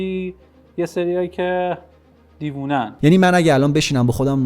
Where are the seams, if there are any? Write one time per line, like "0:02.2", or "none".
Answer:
0:02.9